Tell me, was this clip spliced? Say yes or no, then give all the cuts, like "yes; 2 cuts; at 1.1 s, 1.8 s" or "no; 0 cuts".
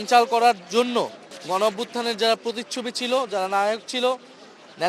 yes; 1 cut; at 1.3 s